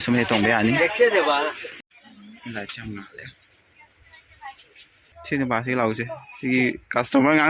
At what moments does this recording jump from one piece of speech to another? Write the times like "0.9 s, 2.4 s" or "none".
1.9 s, 5.1 s